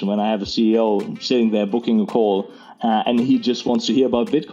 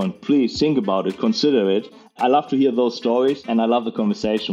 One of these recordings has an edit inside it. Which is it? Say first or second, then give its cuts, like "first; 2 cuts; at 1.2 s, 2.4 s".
second; 2 cuts; at 2.2 s, 3.5 s